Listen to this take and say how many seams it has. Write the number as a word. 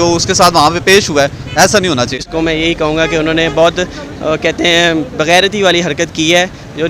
one